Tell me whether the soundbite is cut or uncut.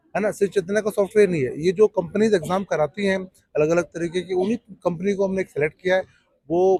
uncut